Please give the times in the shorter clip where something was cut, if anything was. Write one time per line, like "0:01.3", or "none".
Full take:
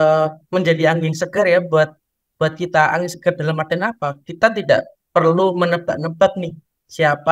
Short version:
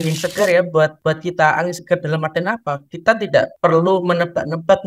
0:01.0
0:03.5

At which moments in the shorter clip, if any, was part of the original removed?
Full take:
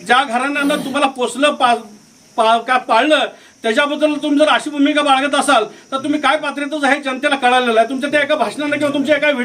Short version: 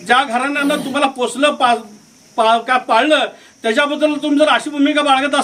none

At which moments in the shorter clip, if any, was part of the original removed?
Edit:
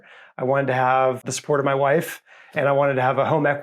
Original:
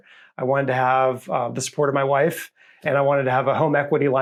0:01.2

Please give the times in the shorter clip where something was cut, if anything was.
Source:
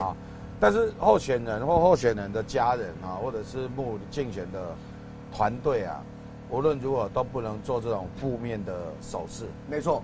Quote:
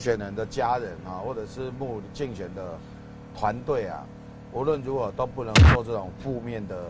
none

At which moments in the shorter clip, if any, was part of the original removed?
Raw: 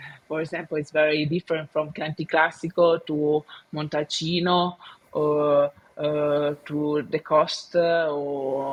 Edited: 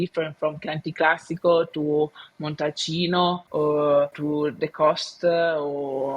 0:03.4
0:04.2

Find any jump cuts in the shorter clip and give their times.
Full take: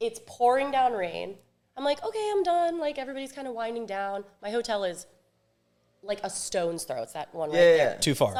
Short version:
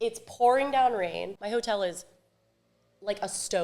0:01.4

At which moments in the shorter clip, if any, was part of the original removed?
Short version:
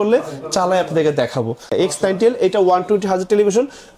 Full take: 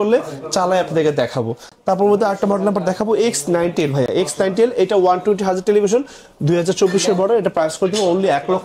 0:01.7

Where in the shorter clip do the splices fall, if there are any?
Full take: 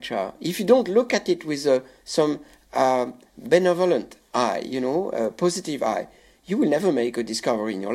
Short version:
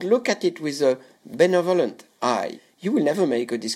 0:01.1
0:02.5

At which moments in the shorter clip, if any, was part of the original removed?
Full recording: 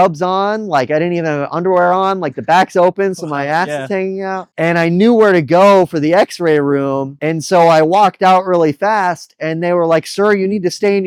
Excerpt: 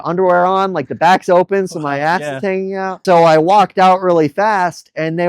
0:03.0

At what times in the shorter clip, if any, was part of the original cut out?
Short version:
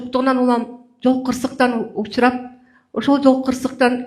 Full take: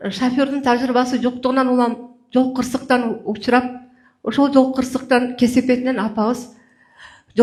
none

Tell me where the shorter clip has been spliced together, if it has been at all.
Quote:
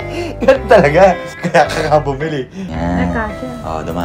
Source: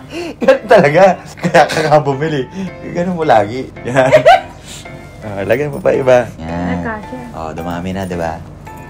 0:02.7

